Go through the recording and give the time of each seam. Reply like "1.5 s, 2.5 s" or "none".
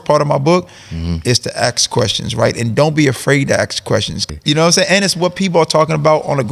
4.3 s